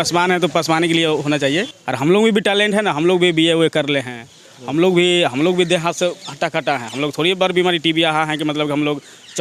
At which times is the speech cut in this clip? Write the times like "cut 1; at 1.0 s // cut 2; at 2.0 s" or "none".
cut 1; at 1.8 s